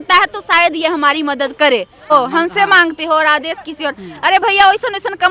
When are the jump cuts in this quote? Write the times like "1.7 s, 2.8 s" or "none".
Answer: 2.1 s